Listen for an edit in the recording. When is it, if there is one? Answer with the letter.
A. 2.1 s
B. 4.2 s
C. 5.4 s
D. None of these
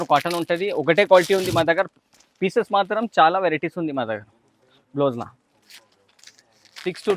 D